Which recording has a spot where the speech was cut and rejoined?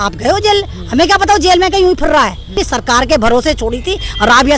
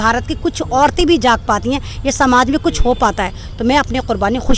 first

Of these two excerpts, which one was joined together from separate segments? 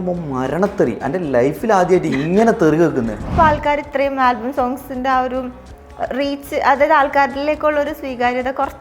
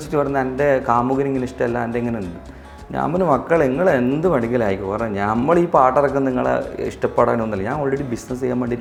first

